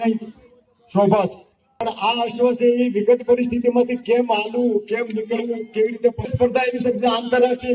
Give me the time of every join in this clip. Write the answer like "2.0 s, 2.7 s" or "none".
1.9 s, 6.3 s